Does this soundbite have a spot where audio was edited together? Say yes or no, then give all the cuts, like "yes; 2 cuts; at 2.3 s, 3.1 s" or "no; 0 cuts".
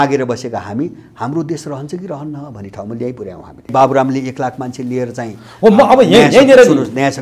yes; 1 cut; at 3.7 s